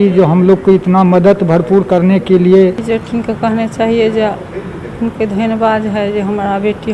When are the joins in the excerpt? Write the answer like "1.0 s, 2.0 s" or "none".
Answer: 2.8 s